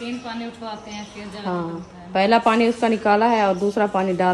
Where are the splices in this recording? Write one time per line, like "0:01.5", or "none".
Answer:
none